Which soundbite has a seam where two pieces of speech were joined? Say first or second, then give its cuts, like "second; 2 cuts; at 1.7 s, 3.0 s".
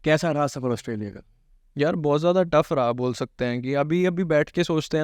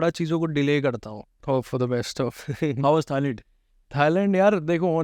second; 1 cut; at 1.4 s